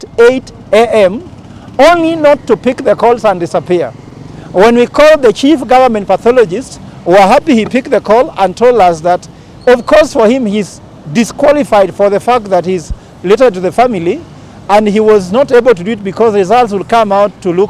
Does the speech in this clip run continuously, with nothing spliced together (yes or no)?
yes